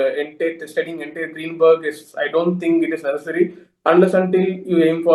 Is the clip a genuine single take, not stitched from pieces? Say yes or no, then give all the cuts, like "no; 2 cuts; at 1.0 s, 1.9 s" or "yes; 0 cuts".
yes; 0 cuts